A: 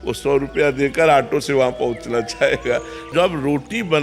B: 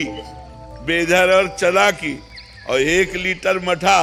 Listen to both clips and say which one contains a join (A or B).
A